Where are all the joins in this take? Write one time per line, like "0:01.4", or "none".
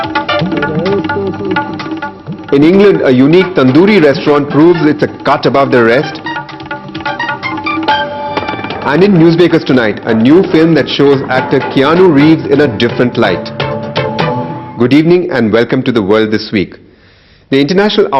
0:06.0